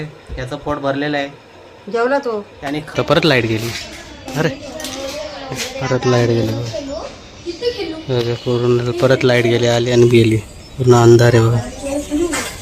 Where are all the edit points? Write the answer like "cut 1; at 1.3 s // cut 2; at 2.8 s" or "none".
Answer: cut 1; at 2.9 s